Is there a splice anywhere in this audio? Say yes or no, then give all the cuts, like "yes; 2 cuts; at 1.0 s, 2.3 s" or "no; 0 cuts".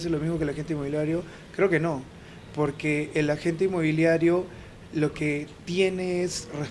no; 0 cuts